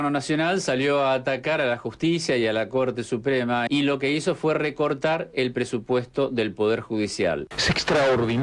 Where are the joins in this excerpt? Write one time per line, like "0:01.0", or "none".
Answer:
0:03.6
0:07.5